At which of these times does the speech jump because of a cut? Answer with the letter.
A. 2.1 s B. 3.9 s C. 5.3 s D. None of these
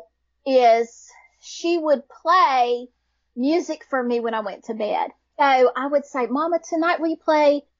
C